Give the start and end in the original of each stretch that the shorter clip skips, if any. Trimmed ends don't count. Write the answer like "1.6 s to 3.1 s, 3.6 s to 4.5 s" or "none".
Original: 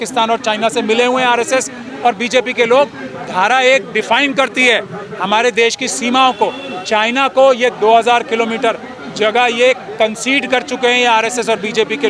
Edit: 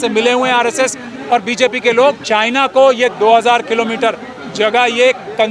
2.9 s to 6.8 s